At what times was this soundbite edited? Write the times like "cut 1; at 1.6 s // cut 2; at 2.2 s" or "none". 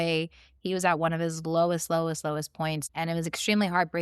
cut 1; at 2.8 s

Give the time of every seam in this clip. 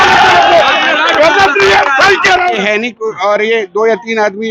cut 1; at 2.5 s

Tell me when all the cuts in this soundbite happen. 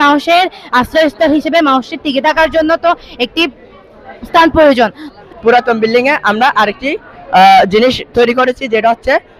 cut 1; at 5.1 s

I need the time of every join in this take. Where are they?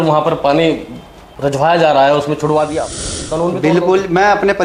cut 1; at 1.2 s // cut 2; at 3.2 s

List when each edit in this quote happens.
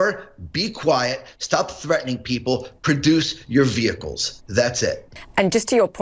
cut 1; at 5.1 s

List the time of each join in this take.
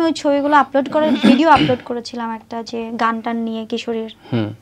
none

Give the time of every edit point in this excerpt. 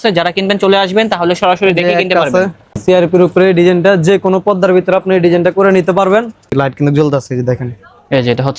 cut 1; at 2.8 s // cut 2; at 6.5 s

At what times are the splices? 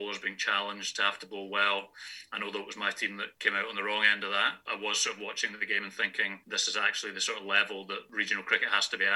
cut 1; at 3.3 s // cut 2; at 4.6 s // cut 3; at 6.4 s // cut 4; at 8.1 s

